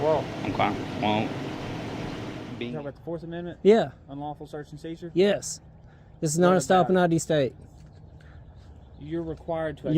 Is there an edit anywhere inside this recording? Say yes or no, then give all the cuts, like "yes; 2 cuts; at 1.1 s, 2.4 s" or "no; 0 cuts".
yes; 1 cut; at 2.5 s